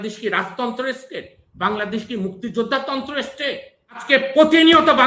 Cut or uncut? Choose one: cut